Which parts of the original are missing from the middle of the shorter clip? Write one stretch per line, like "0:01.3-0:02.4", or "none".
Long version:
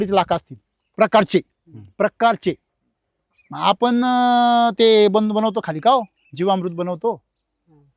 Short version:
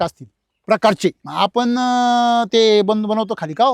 0:01.5-0:03.5